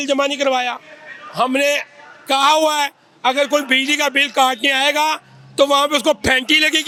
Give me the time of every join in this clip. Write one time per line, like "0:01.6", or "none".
none